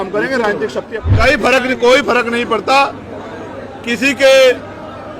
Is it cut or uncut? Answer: cut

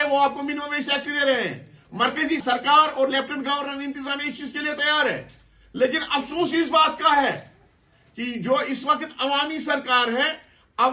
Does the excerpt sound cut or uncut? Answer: cut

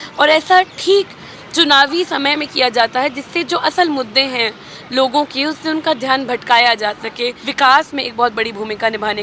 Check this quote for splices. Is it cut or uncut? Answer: cut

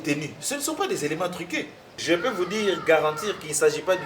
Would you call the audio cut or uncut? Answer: cut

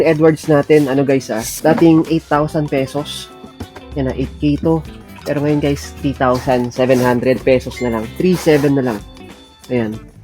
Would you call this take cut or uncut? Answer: uncut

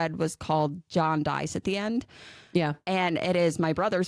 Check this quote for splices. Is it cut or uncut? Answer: uncut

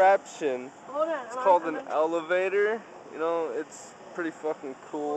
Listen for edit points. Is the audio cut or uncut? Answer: uncut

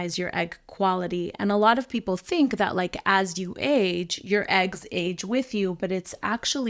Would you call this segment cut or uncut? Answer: uncut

